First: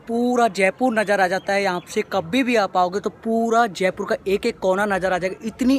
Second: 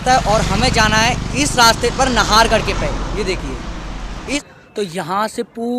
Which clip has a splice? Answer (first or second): second